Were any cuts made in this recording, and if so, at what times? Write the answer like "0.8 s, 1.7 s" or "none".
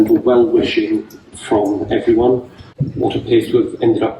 2.8 s